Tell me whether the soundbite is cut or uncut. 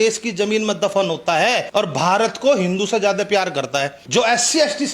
cut